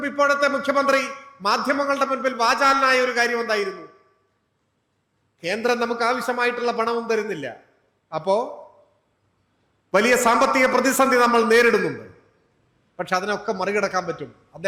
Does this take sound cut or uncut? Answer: uncut